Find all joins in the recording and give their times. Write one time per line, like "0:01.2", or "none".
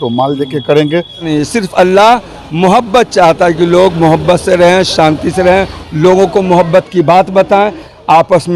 0:01.2